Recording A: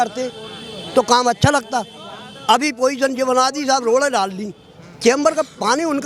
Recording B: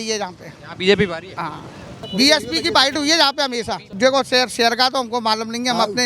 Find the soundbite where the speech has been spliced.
B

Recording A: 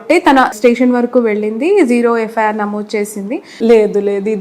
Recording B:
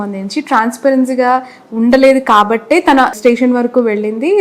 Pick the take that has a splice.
A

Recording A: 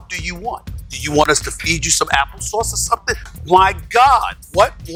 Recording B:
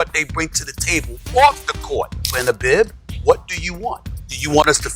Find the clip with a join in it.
B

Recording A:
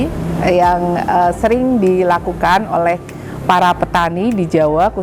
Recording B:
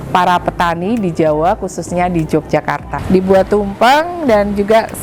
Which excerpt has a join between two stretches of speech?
B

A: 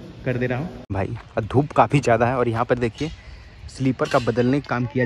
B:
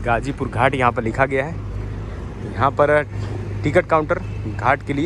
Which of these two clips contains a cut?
A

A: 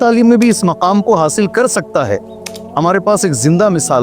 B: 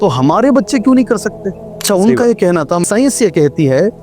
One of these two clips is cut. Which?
B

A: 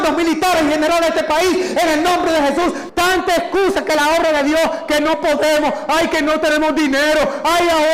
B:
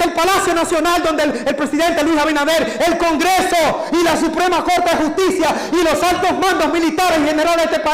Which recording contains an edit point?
A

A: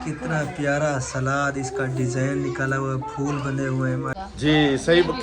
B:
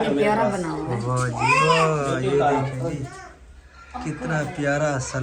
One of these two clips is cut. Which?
A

